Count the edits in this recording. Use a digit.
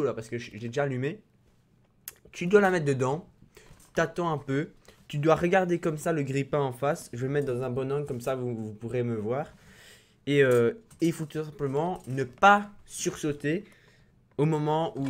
1